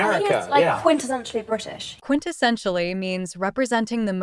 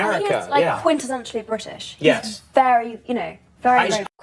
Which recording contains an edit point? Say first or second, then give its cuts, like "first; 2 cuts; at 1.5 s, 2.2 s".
first; 1 cut; at 1.9 s